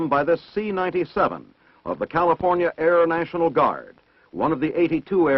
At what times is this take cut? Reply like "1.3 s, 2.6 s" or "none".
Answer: 2.5 s